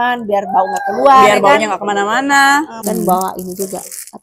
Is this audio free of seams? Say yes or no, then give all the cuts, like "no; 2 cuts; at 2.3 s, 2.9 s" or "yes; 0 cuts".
no; 1 cut; at 2.8 s